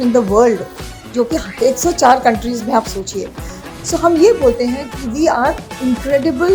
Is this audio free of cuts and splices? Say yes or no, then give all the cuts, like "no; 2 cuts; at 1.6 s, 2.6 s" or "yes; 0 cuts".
yes; 0 cuts